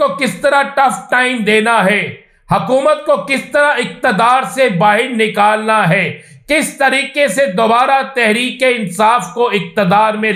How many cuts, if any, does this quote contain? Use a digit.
0